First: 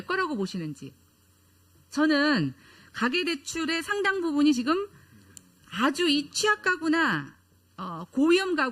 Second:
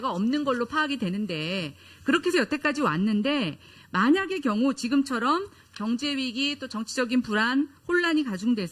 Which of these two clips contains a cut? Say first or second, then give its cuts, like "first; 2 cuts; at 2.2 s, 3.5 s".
first; 1 cut; at 3.4 s